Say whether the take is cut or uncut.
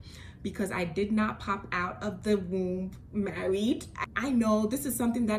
cut